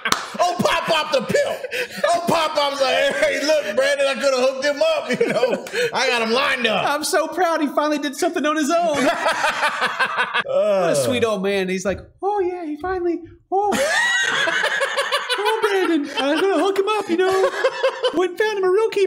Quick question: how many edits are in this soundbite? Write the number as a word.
one